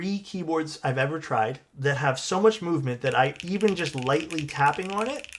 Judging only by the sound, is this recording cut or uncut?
cut